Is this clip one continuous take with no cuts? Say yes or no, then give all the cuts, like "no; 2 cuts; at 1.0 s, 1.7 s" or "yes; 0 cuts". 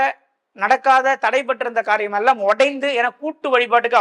yes; 0 cuts